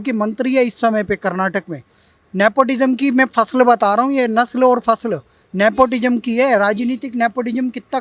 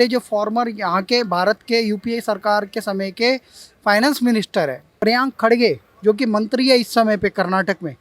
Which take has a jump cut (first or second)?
second